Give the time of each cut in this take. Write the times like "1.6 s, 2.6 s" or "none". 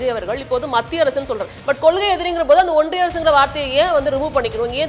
1.5 s